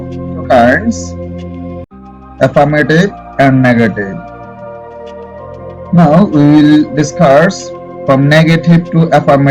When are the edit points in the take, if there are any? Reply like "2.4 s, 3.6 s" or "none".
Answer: 0.9 s, 2.3 s, 4.1 s, 5.9 s